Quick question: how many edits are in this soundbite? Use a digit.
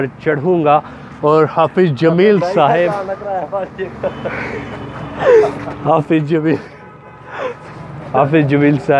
0